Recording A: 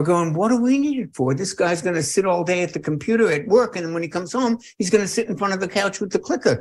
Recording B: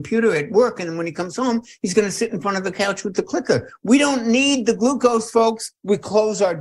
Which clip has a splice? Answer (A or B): B